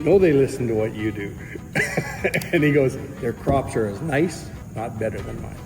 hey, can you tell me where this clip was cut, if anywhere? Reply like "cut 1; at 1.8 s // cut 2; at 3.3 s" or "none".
cut 1; at 4.6 s